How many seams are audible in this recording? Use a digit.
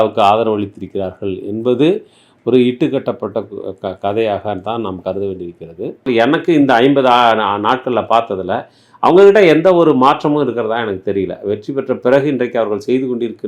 1